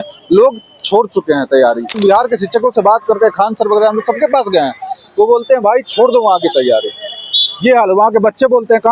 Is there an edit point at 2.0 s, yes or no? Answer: yes